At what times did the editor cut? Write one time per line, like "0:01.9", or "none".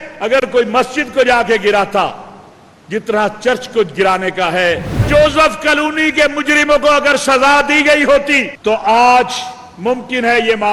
0:05.1
0:08.5